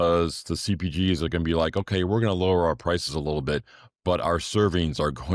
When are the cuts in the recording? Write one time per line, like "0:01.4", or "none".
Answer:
none